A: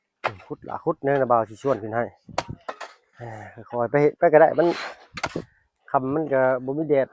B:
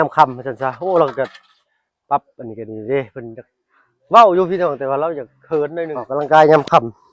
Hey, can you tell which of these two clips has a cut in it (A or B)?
B